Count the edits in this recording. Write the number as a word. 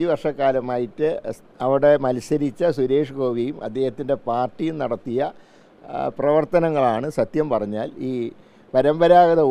zero